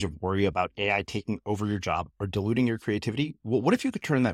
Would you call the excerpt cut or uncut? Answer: uncut